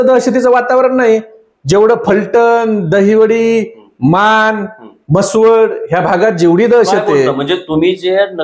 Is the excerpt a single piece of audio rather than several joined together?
yes; 0 cuts

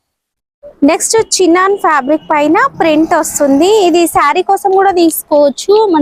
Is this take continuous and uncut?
yes; 0 cuts

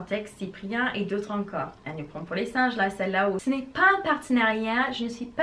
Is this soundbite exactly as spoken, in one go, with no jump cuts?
no; 2 cuts; at 1.8 s, 3.4 s

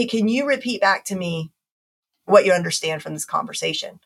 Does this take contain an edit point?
no; 0 cuts

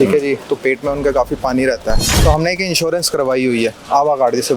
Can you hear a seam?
yes; 1 cut; at 2.1 s

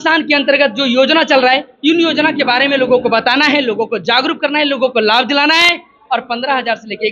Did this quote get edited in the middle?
no; 0 cuts

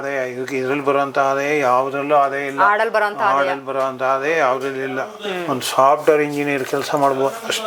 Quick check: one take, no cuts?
yes; 0 cuts

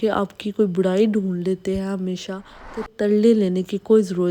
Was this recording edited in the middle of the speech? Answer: yes; 1 cut; at 2.9 s

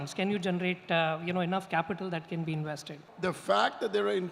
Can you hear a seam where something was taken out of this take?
yes; 1 cut; at 3.0 s

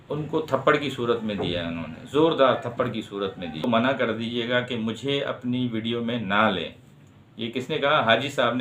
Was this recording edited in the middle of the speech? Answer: yes; 1 cut; at 3.6 s

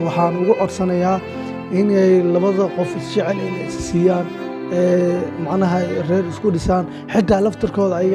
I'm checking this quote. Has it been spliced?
no; 0 cuts

